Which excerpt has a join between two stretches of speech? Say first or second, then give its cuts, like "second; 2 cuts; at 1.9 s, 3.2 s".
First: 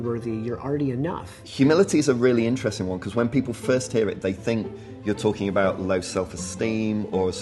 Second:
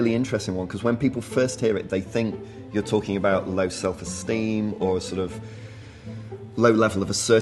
first; 1 cut; at 1.4 s